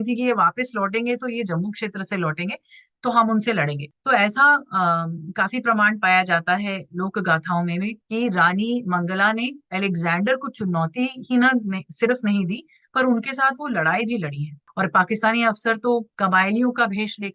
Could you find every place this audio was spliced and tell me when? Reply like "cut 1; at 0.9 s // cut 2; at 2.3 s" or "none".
cut 1; at 14.6 s // cut 2; at 16.1 s